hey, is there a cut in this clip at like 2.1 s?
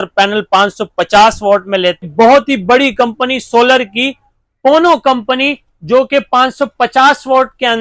yes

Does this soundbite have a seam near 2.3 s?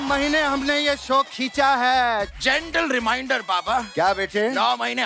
yes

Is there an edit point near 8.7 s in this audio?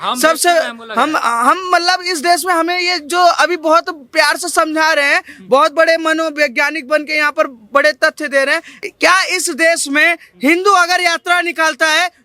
yes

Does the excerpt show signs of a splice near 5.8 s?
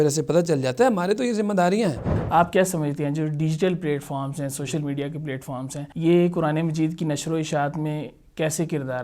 yes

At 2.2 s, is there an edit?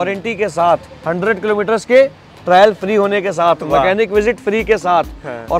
no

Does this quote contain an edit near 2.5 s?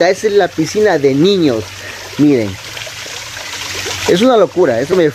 no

